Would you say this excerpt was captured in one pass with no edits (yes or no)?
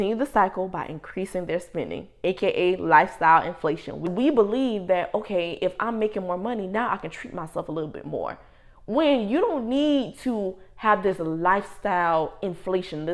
no